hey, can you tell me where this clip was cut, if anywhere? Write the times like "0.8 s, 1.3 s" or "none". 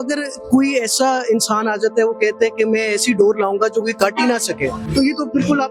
none